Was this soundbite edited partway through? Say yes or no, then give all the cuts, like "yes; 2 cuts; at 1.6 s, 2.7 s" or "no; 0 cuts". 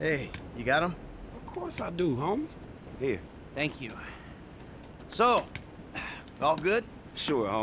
no; 0 cuts